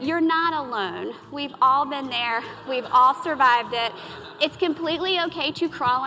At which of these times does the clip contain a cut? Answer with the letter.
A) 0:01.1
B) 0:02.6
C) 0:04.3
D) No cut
D